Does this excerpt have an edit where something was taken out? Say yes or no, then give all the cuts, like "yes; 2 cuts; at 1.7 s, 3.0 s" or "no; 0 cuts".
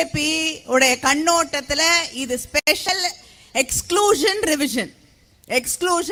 no; 0 cuts